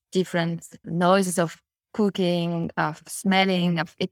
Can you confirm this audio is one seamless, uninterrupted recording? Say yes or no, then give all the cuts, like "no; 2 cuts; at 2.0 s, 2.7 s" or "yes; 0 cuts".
yes; 0 cuts